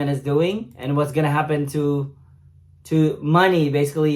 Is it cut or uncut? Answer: uncut